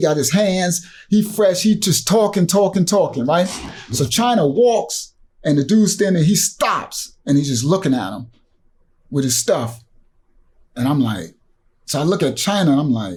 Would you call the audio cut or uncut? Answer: uncut